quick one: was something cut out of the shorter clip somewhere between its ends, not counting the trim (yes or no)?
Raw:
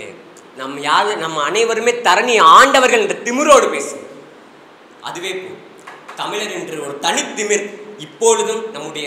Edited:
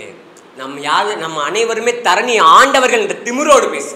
no